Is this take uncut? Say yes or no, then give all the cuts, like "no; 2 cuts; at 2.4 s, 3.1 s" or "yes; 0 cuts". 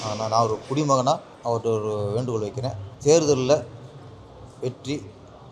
no; 2 cuts; at 1.3 s, 2.9 s